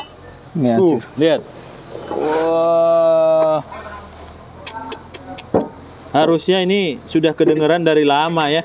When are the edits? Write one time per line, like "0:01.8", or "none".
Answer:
none

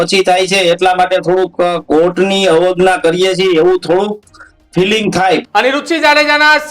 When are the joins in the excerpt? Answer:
0:05.4

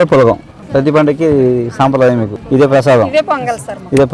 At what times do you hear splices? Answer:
0:02.3

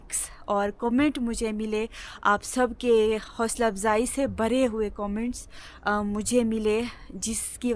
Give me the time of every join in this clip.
none

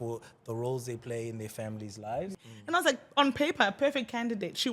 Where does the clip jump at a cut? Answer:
0:02.4

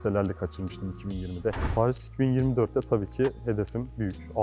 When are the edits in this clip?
0:01.6

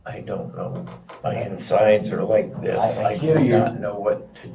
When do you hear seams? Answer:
0:01.1

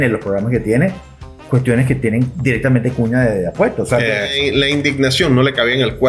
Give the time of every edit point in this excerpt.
0:04.3

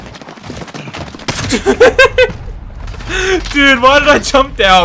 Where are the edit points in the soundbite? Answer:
none

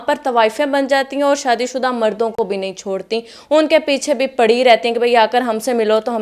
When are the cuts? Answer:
none

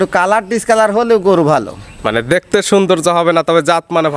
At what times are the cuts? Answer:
none

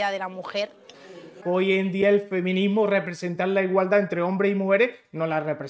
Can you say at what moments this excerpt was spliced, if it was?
0:01.4

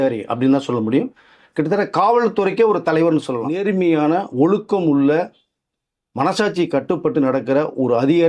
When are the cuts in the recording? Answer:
0:03.5

